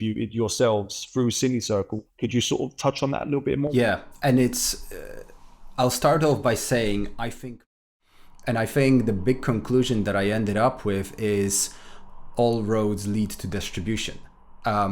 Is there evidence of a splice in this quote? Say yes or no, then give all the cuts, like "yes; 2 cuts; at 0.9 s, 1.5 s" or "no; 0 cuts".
yes; 3 cuts; at 2.0 s, 3.7 s, 7.7 s